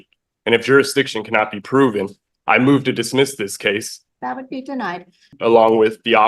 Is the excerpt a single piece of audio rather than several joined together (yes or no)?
no